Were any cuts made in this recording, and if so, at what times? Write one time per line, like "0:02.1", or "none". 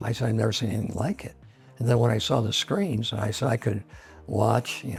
none